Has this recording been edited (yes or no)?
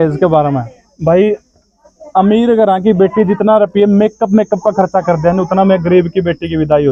no